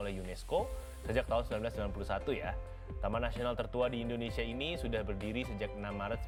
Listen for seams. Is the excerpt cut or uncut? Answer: uncut